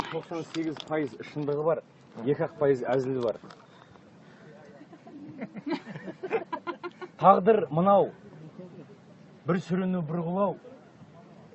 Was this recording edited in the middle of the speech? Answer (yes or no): no